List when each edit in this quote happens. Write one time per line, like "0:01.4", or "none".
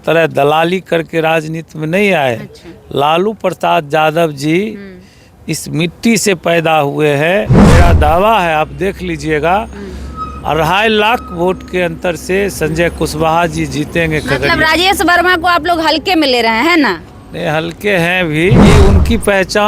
0:07.6
0:18.6